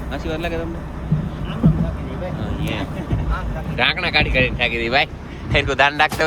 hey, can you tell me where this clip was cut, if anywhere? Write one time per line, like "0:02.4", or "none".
none

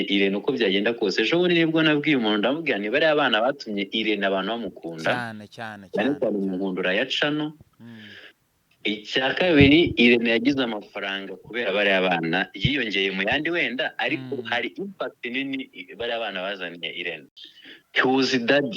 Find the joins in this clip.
0:17.2

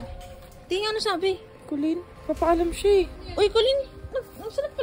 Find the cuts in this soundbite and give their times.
0:02.1
0:03.2

